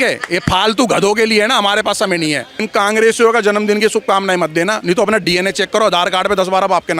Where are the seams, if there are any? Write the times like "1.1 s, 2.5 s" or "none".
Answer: 2.5 s